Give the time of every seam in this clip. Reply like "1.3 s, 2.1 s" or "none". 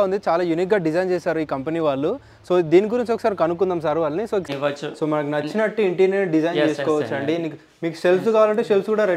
4.5 s